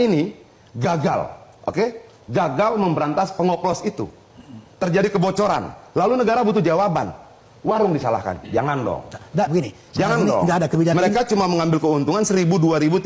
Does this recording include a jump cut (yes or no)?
no